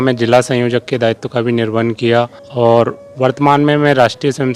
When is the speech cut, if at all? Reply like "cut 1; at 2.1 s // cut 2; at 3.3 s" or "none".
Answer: cut 1; at 2.4 s